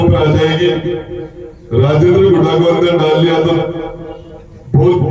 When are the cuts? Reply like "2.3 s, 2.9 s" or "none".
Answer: none